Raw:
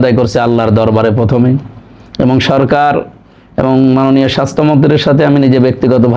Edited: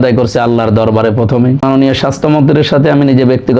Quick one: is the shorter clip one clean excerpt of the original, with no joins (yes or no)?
no